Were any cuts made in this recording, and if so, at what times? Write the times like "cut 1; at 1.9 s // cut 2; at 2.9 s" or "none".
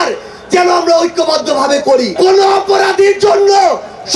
cut 1; at 2.1 s